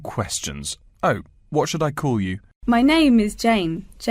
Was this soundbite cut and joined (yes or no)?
yes